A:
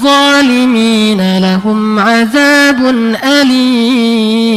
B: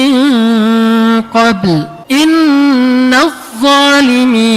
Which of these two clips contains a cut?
B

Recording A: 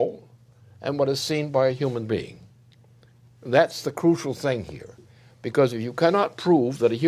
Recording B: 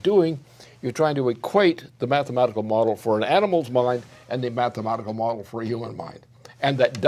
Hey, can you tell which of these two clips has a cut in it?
A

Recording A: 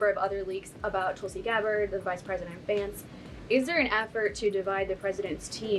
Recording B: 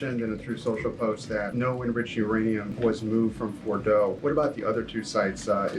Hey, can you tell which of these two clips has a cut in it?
B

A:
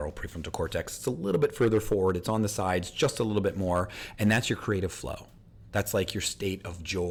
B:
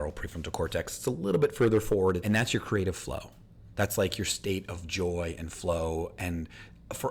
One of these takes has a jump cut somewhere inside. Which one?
B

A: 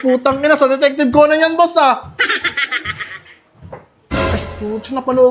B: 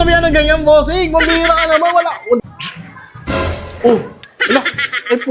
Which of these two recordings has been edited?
B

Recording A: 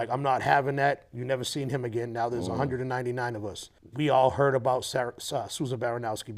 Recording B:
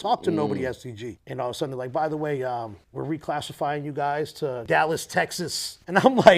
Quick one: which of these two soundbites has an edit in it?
B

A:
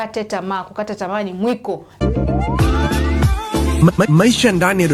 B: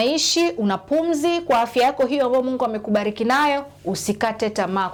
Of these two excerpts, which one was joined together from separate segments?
A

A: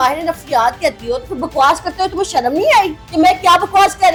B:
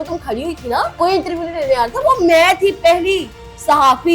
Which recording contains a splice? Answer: B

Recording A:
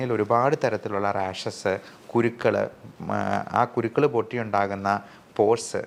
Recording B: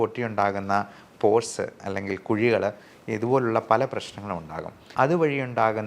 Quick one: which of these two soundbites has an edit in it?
B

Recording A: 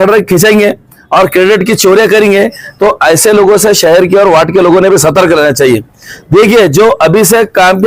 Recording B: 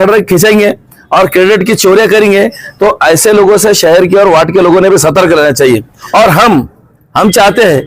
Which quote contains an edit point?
B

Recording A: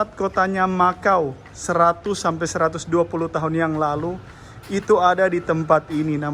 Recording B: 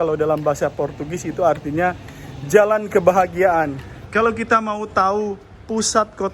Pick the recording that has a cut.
B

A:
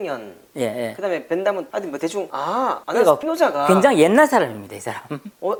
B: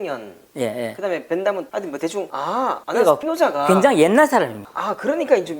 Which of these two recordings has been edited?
B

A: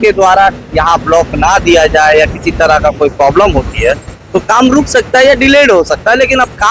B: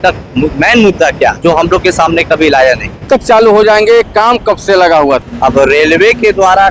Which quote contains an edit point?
B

